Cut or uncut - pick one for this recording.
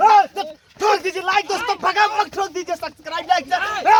uncut